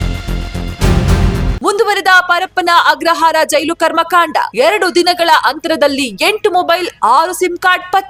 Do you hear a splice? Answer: no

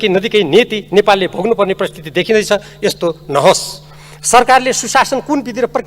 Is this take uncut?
yes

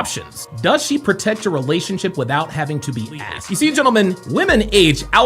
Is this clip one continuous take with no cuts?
no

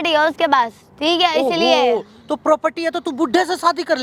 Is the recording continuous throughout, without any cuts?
yes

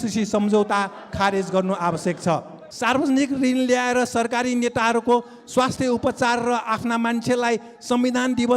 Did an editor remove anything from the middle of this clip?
yes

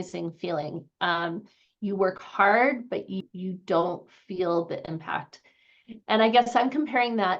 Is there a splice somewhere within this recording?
yes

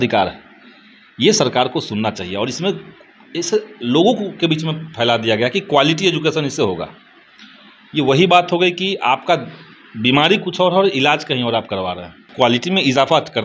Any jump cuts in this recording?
yes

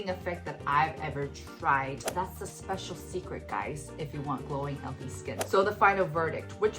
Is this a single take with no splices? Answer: no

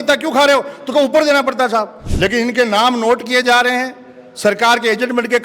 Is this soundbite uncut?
no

